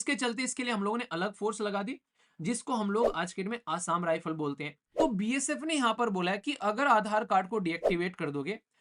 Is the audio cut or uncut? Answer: cut